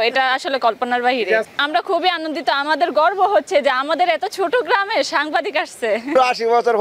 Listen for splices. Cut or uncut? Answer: cut